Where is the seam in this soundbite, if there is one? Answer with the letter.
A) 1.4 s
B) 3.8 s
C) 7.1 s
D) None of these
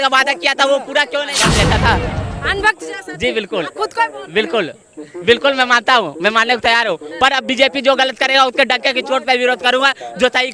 A